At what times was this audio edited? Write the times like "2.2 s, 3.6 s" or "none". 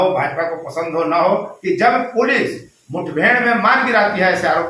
1.5 s